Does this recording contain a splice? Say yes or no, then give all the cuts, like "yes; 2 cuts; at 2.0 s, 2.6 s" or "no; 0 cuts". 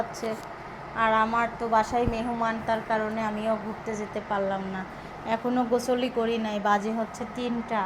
no; 0 cuts